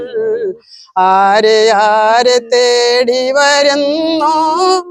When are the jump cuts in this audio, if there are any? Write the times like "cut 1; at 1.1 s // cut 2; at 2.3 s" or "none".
none